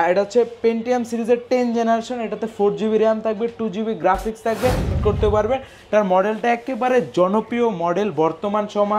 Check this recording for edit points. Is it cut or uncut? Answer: cut